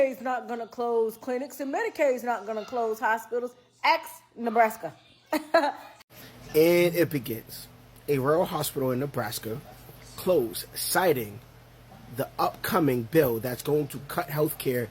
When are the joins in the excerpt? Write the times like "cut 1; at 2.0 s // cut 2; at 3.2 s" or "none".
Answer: cut 1; at 5.8 s